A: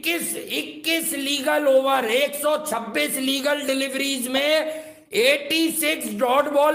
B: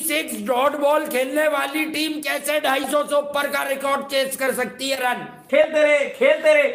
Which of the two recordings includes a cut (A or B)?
B